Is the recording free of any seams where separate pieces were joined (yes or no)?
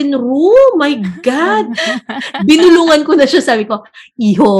no